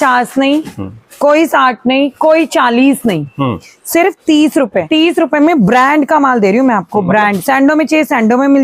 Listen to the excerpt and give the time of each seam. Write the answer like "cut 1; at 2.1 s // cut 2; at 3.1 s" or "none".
cut 1; at 4.9 s // cut 2; at 7.4 s